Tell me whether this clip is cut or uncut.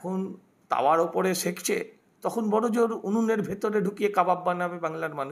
uncut